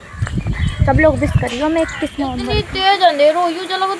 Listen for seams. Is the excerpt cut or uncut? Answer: cut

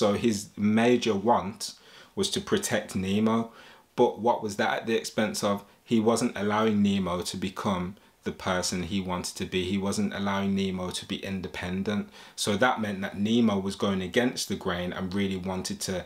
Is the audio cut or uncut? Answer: uncut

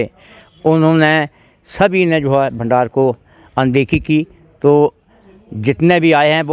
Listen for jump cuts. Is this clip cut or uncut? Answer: uncut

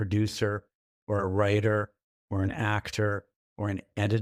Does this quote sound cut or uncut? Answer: uncut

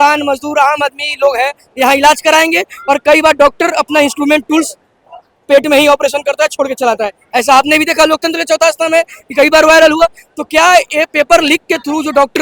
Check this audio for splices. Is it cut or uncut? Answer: uncut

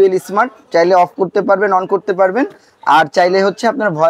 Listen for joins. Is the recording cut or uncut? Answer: uncut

